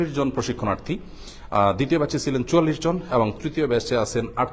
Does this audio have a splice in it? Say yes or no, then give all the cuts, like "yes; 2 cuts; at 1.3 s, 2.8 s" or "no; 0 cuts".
no; 0 cuts